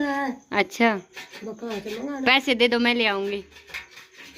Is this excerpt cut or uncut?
uncut